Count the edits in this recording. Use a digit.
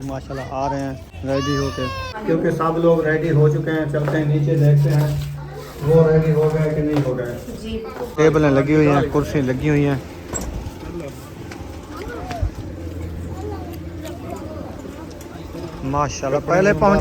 3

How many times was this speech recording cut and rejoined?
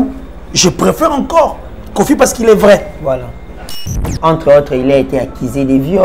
1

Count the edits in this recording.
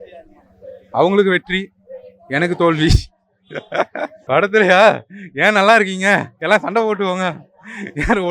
1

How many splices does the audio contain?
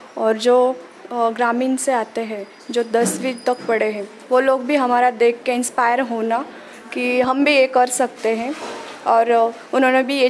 0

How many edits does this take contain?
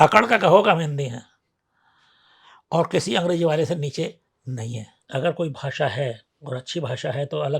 1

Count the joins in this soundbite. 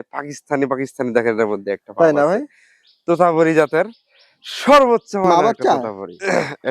1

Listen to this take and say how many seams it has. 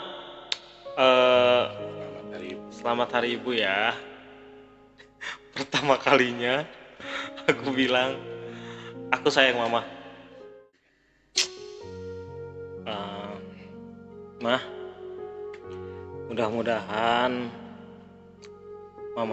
1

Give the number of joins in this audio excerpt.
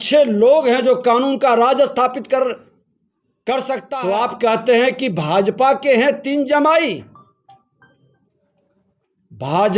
1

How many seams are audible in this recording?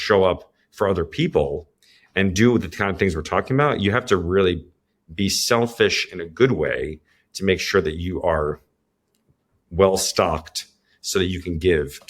0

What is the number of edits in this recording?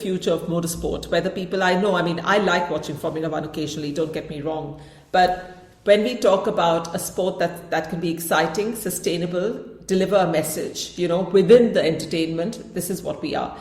0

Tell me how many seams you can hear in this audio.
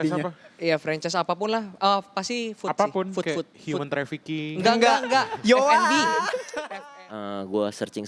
1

